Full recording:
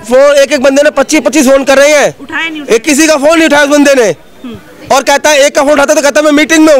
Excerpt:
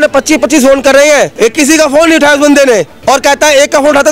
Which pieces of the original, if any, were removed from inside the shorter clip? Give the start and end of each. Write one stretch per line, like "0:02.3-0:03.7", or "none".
0:02.1-0:02.6
0:04.2-0:04.8